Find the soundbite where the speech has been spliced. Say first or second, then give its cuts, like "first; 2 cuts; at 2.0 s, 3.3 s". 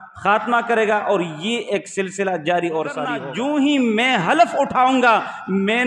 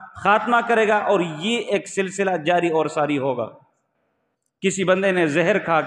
first; 1 cut; at 3.2 s